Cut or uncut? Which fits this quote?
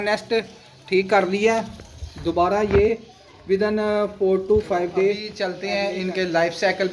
cut